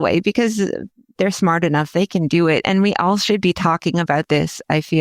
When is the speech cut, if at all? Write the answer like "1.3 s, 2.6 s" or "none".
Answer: none